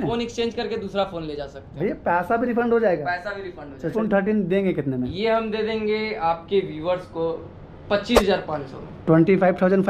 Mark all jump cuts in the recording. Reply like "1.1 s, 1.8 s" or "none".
3.9 s